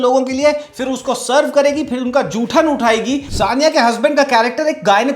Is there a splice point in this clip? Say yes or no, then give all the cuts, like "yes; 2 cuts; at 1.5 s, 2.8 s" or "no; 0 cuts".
yes; 1 cut; at 3.3 s